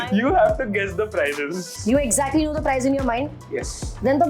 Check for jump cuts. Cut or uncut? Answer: cut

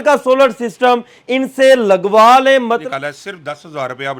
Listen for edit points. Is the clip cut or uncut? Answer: cut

